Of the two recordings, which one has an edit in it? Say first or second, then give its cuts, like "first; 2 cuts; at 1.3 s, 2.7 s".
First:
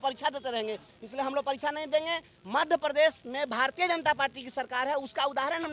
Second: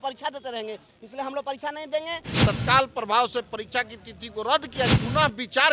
second; 2 cuts; at 2.3 s, 4.9 s